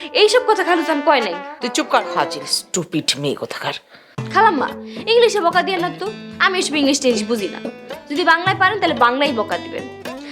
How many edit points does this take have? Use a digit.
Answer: 1